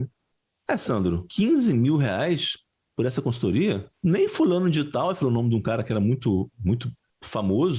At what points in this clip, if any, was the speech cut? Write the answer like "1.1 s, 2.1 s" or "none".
1.3 s, 3.9 s